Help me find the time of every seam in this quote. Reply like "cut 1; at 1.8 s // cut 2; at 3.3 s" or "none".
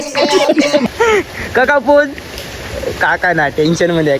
cut 1; at 0.9 s